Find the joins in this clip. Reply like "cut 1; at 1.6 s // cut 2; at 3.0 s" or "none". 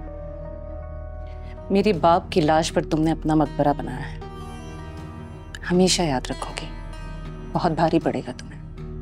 cut 1; at 1.6 s